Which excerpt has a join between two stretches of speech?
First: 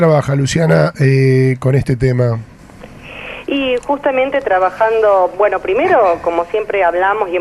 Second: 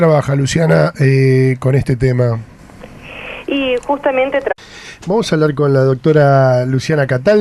first; 1 cut; at 4.5 s

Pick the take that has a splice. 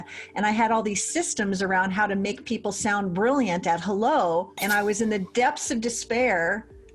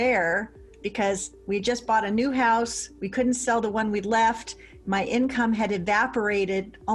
first; 1 cut; at 4.5 s

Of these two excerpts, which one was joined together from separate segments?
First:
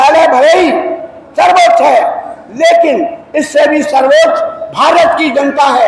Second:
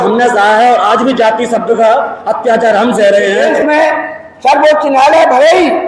second; 1 cut; at 3.5 s

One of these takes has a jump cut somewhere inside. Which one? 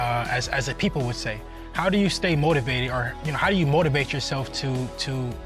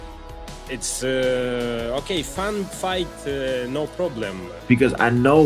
second; 1 cut; at 4.3 s

